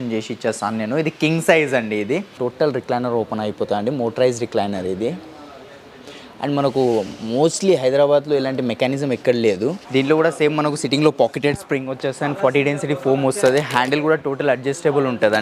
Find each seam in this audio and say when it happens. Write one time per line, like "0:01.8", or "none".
0:02.3
0:09.8